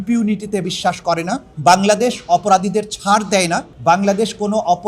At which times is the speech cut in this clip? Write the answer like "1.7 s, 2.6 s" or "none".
1.5 s, 3.7 s